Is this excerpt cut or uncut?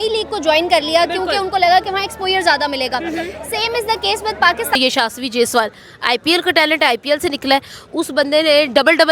cut